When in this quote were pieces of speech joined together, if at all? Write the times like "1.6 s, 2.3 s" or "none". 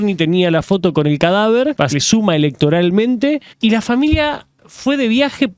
1.9 s, 3.5 s